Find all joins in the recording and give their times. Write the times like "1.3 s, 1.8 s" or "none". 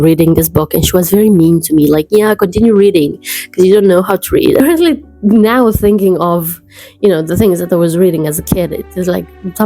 4.6 s